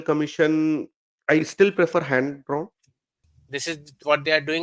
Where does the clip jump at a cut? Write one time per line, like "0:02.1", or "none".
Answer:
0:03.2